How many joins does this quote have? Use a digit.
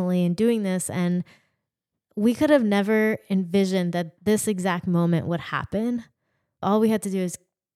2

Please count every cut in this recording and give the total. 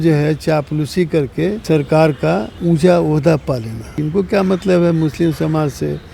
3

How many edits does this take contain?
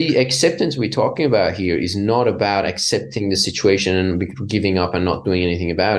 0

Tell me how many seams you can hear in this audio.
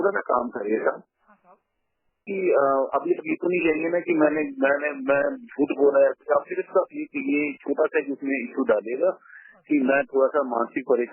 1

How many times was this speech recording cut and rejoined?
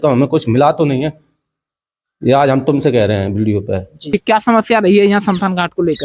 1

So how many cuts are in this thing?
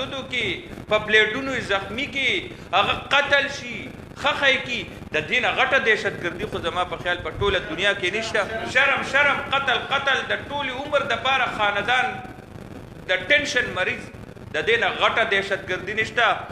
1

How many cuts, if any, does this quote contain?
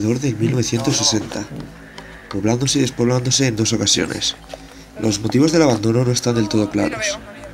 1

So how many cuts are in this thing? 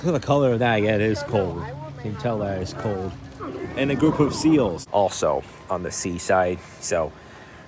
1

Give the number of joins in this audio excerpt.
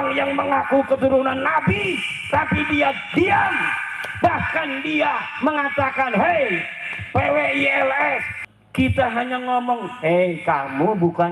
1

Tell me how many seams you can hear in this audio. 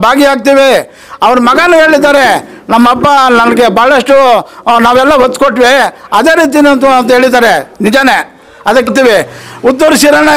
1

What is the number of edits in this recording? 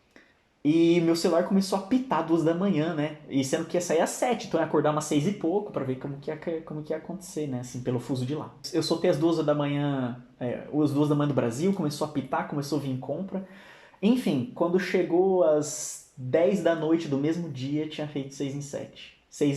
1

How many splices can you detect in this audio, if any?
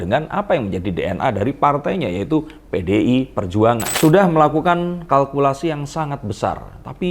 1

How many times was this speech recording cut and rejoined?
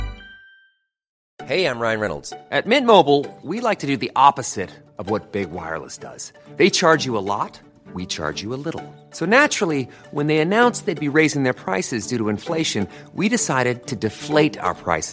1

